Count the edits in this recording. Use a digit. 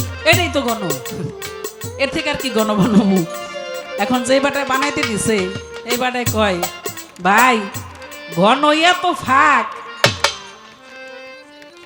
0